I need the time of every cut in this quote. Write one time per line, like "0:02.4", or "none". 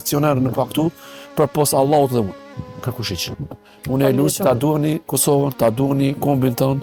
none